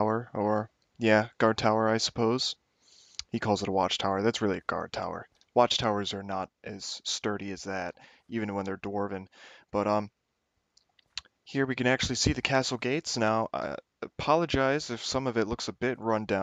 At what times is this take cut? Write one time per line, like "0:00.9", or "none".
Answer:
none